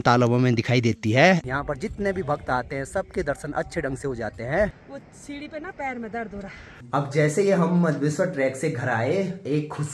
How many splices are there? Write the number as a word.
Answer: three